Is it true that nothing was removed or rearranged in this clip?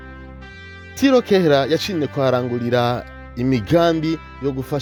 yes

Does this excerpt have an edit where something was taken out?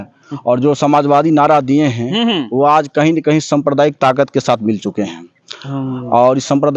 no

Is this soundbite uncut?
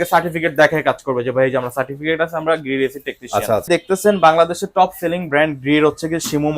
no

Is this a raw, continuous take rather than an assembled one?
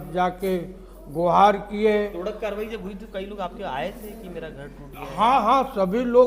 yes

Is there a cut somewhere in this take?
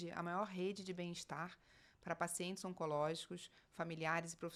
no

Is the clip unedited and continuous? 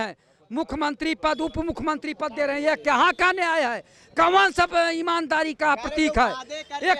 yes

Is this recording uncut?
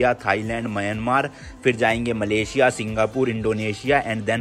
yes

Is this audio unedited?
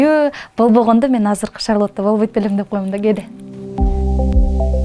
yes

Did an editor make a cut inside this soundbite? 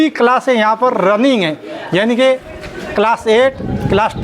no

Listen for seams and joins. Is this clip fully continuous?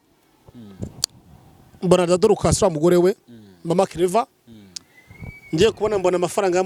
yes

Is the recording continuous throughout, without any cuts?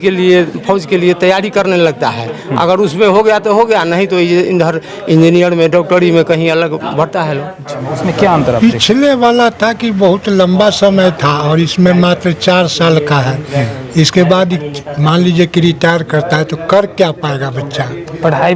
no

